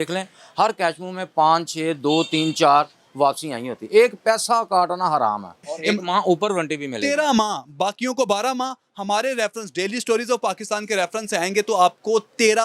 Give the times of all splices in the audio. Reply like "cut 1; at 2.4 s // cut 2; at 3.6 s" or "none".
cut 1; at 5.7 s